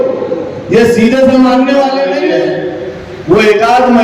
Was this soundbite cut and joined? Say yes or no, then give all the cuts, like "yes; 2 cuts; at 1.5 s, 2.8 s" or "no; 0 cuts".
yes; 1 cut; at 2.2 s